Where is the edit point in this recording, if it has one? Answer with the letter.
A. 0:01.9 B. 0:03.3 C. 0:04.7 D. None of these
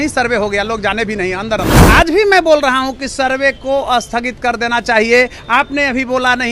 A